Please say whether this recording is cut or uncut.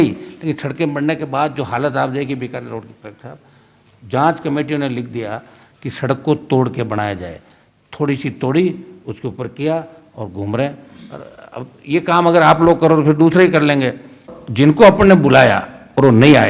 cut